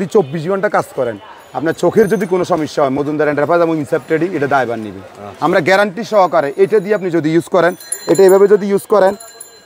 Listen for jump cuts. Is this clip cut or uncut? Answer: uncut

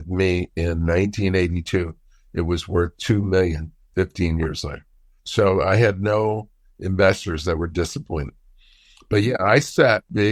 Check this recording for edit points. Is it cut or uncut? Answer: uncut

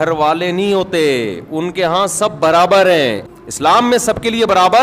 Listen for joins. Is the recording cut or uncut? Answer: cut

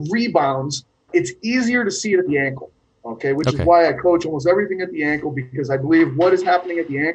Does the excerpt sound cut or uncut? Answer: cut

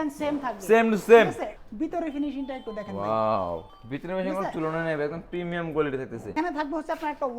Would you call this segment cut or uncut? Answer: cut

